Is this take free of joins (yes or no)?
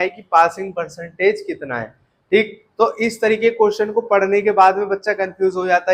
yes